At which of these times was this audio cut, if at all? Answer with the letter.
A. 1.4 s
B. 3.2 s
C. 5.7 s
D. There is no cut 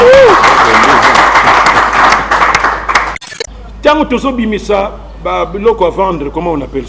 B